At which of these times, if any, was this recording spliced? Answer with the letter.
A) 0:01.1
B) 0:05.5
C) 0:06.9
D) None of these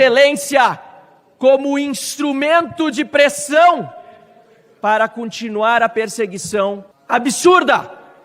C